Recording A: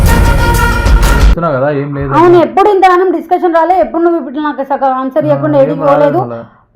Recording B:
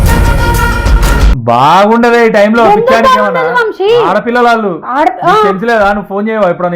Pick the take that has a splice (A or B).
B